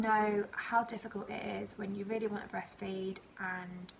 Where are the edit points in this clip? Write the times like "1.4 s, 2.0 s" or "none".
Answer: none